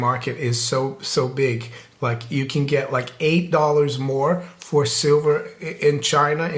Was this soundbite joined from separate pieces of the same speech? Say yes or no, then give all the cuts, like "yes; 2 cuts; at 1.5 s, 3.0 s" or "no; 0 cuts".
no; 0 cuts